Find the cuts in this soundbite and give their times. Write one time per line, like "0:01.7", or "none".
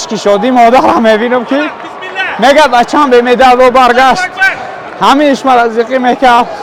none